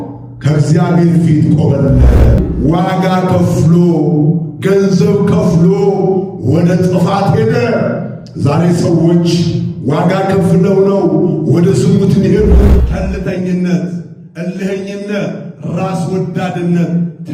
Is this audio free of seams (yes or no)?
no